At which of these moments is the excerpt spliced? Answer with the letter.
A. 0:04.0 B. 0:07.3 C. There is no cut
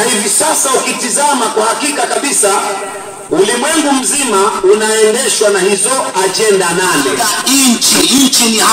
B